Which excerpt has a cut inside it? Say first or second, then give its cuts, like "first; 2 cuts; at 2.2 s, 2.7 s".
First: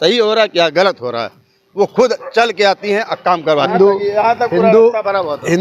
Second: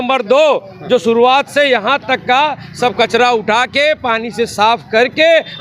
first; 1 cut; at 3.7 s